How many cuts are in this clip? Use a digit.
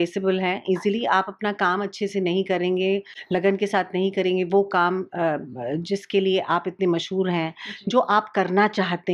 0